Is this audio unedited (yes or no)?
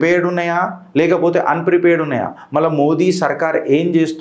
yes